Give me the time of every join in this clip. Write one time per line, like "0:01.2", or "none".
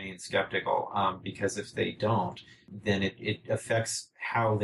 0:02.7